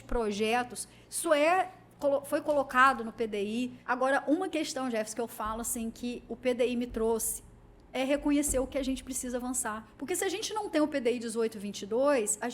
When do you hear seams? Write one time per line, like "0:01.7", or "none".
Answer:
0:03.8
0:09.9